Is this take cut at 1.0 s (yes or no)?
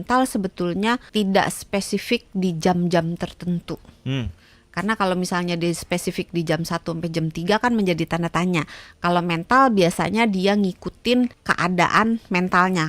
yes